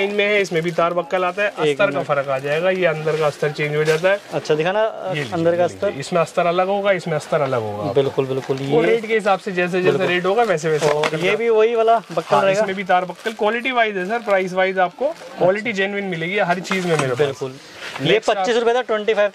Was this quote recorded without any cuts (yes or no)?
yes